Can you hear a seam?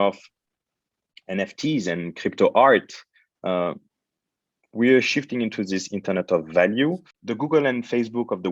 yes; 1 cut; at 7.1 s

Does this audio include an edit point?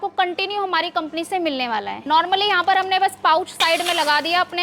yes; 1 cut; at 2.0 s

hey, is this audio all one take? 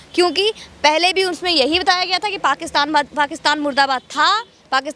yes; 0 cuts

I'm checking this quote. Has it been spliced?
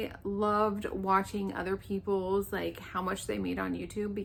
no; 0 cuts

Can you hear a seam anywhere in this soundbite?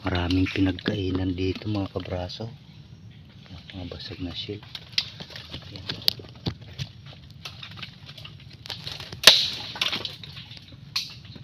no; 0 cuts

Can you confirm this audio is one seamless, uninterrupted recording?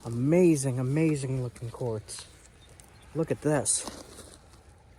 yes; 0 cuts

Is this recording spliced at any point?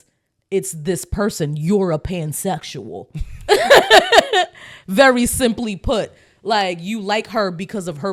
no; 0 cuts

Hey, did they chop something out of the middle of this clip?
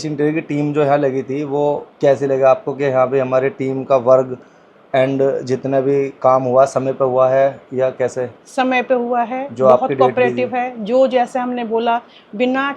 yes; 1 cut; at 1.9 s

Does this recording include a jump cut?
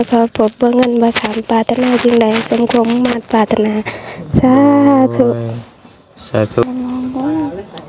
yes; 1 cut; at 6.6 s

